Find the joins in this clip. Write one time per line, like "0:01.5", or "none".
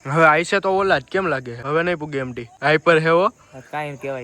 0:01.5
0:02.4